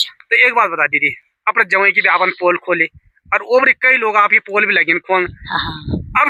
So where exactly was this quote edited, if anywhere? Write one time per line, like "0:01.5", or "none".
none